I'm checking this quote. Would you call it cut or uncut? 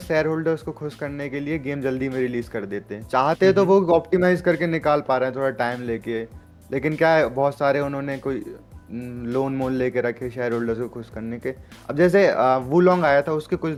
uncut